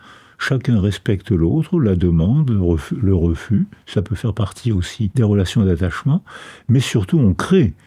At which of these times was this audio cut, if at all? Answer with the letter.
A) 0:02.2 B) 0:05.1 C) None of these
B